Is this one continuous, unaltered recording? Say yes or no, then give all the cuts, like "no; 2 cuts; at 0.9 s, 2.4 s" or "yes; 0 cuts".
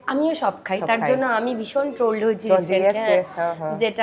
yes; 0 cuts